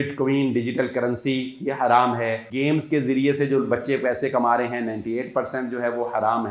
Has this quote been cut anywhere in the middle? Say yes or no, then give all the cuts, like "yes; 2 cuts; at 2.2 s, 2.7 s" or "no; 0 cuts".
yes; 1 cut; at 2.4 s